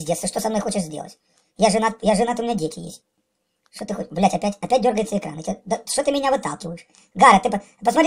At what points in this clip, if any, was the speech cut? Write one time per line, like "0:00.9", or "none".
none